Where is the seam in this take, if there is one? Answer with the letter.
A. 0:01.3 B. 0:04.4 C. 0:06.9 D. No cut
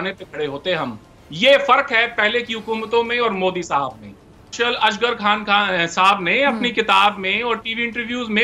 B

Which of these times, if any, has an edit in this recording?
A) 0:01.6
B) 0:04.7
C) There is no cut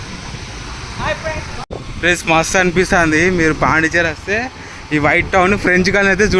A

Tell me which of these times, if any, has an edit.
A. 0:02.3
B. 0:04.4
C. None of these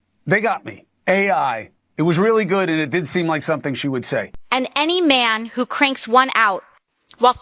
B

